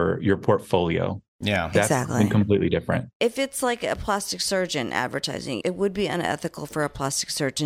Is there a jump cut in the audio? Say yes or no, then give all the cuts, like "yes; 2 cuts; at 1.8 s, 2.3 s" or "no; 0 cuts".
yes; 2 cuts; at 3.1 s, 5.6 s